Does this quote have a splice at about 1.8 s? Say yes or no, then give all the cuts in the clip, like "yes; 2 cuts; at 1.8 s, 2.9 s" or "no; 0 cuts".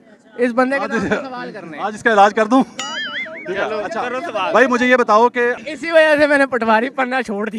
no; 1 cut; at 5.7 s